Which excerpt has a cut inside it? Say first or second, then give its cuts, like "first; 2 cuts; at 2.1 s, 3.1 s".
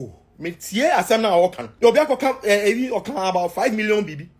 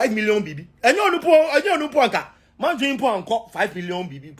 first; 1 cut; at 1.7 s